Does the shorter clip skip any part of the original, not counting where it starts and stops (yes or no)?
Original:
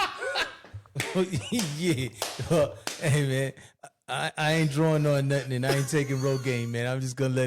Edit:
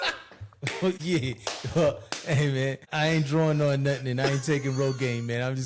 yes